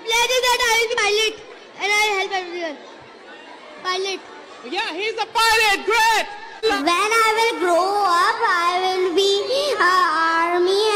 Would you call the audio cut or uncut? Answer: cut